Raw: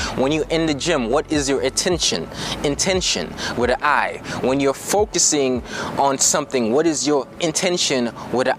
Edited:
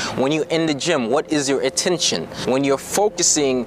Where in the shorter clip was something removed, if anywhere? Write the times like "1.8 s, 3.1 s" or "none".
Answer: 2.3 s